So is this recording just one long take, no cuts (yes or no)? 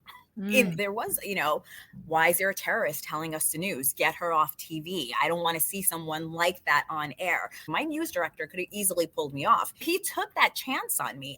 no